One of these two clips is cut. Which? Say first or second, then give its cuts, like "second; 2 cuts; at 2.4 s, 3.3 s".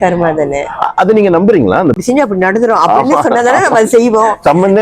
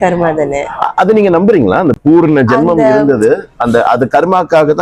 first; 1 cut; at 2.0 s